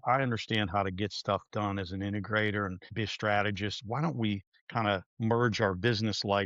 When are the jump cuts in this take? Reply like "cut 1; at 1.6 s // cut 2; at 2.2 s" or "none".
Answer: cut 1; at 2.8 s // cut 2; at 4.6 s